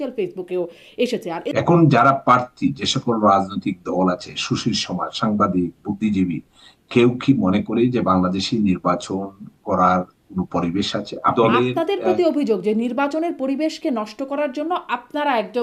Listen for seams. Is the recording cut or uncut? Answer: cut